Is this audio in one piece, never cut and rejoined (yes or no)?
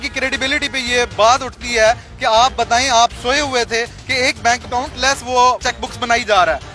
yes